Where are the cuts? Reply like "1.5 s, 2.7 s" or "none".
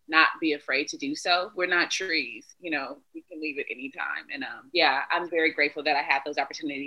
4.7 s